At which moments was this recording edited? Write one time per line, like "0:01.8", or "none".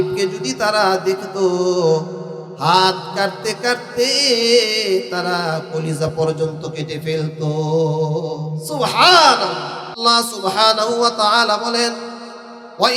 0:10.0